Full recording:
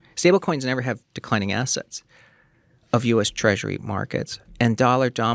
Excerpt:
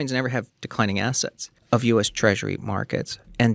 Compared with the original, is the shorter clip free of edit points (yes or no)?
no